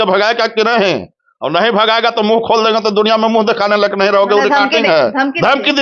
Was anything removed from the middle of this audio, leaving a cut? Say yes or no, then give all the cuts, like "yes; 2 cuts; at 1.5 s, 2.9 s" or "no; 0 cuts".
no; 0 cuts